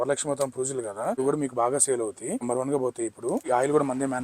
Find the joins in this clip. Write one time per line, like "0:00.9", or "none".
0:01.2
0:02.4
0:03.4

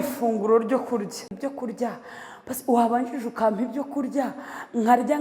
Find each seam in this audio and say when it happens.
0:01.3

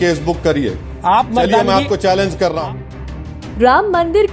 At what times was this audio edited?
none

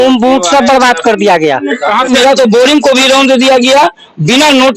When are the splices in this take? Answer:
0:02.1

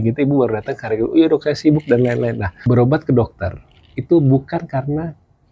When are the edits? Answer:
0:02.5

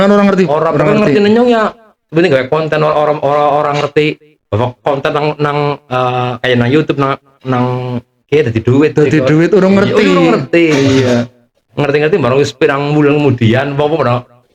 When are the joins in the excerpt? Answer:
none

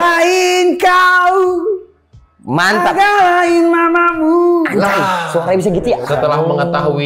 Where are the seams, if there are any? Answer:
0:06.0

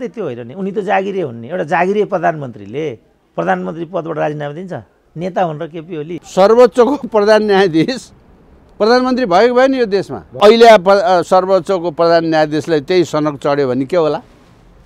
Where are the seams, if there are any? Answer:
0:06.2
0:10.4

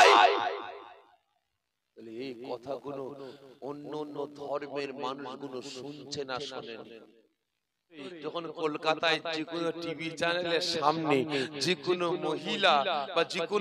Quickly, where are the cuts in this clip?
0:08.1

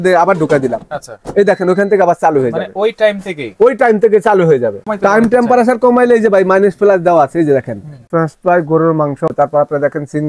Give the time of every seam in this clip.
0:04.8
0:08.0
0:09.3

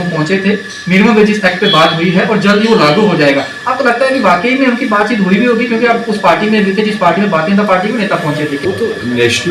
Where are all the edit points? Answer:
0:08.6

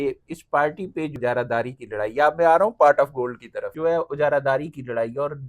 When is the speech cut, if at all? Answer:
0:01.2
0:03.7

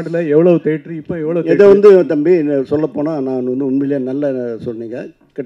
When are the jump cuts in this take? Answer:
none

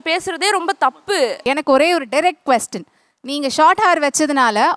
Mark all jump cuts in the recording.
0:01.2

